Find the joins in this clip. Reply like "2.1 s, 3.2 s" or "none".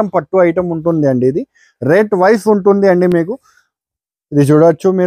none